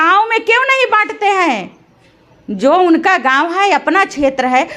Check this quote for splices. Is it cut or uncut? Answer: uncut